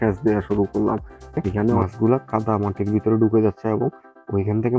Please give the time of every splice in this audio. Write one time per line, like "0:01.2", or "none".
0:01.8

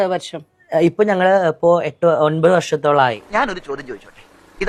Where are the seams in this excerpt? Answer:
none

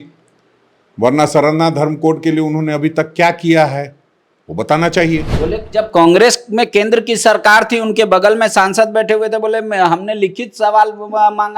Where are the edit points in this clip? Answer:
0:05.3

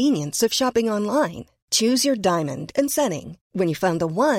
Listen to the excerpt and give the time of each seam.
none

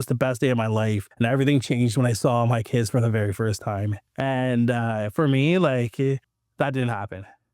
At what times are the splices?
0:01.1
0:04.0
0:06.4

